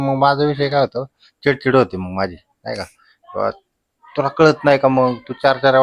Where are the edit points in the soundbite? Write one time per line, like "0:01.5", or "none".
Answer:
none